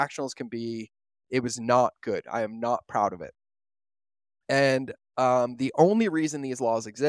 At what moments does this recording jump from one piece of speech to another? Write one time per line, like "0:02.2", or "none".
none

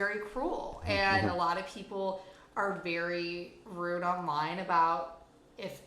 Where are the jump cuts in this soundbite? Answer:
0:03.6

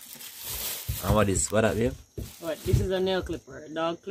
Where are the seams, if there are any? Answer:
none

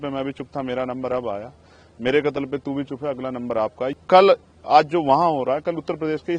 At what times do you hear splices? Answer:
0:03.9

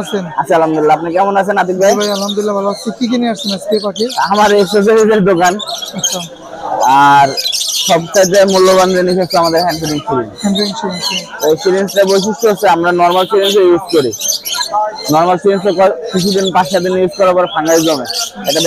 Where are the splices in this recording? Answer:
none

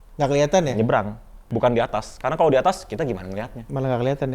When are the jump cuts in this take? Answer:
0:01.5

